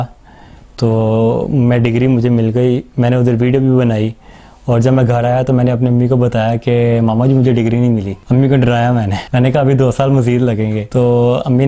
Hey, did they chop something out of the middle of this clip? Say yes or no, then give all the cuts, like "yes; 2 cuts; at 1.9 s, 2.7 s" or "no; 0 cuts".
yes; 3 cuts; at 8.2 s, 9.2 s, 10.8 s